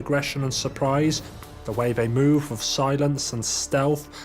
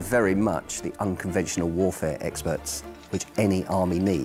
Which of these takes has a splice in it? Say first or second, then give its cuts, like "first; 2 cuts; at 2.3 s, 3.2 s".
first; 1 cut; at 1.4 s